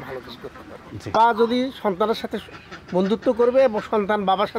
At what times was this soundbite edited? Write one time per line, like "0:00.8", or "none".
none